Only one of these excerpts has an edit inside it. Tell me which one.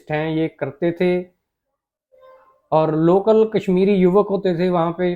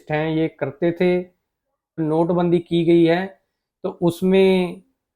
second; 1 cut; at 2.0 s

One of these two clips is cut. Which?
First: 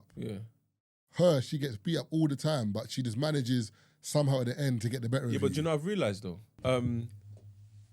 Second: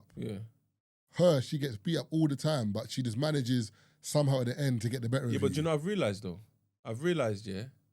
first; 1 cut; at 6.6 s

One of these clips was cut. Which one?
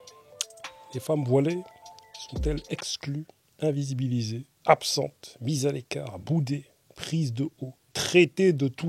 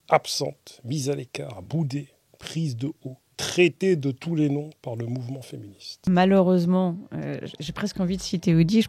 second; 1 cut; at 6.1 s

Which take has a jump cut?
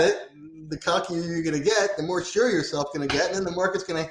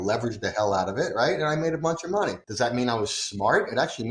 second; 1 cut; at 2.4 s

